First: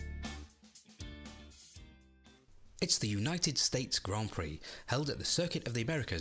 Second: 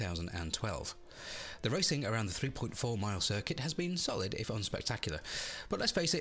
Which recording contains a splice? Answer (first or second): first